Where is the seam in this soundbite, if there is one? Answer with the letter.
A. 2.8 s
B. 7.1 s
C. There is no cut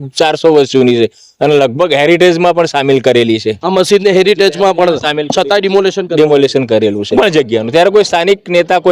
B